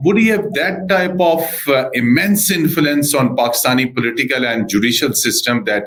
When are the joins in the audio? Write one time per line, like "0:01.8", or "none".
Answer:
none